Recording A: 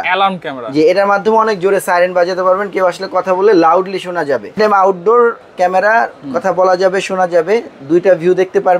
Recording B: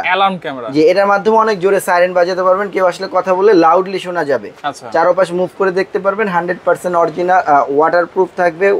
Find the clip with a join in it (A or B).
A